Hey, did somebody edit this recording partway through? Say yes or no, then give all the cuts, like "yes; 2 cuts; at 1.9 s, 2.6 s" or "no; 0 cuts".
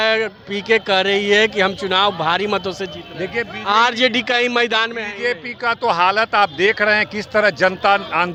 no; 0 cuts